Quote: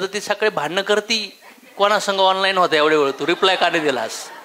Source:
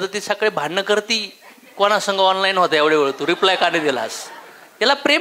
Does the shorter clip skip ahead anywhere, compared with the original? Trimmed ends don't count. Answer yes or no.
no